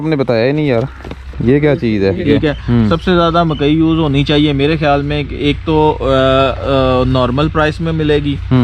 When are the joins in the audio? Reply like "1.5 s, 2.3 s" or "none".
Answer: 2.2 s